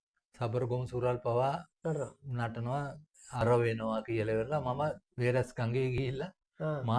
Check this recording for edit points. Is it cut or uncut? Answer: cut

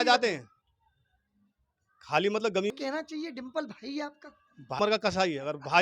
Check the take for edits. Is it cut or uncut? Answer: cut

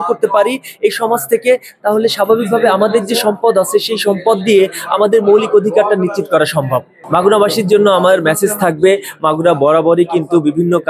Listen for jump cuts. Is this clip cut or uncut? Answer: uncut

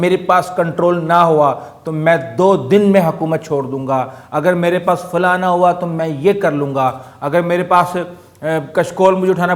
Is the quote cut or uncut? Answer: uncut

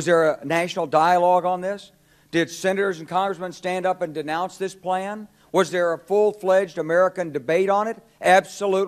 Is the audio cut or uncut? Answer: uncut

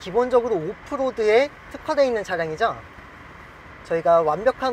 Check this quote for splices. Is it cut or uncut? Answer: uncut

